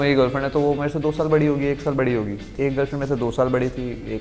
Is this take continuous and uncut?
no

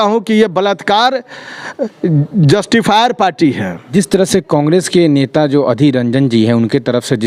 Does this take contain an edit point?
no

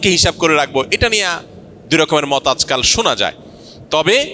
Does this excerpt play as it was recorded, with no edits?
yes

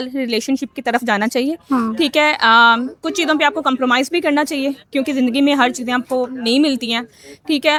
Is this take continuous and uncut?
yes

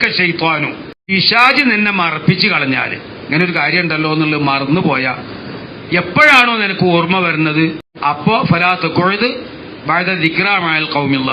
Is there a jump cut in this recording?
yes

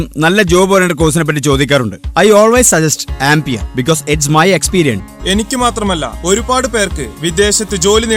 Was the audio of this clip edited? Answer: yes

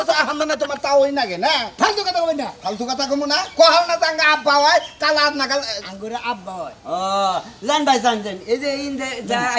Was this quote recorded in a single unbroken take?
yes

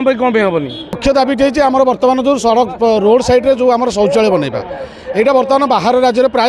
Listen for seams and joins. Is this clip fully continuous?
no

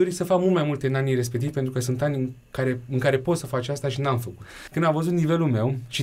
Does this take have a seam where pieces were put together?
yes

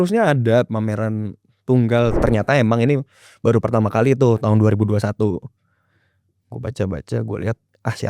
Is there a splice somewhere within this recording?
yes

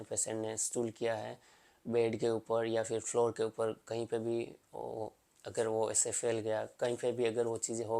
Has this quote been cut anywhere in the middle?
no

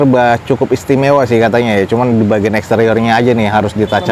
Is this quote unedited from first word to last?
yes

